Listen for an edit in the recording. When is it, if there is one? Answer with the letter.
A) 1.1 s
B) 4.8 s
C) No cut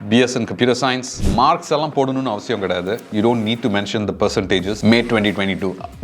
A